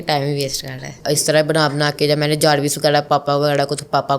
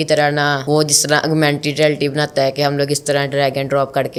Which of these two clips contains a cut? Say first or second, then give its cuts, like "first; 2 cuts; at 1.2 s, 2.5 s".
first; 1 cut; at 1.0 s